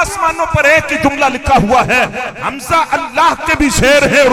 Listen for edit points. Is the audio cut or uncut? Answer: uncut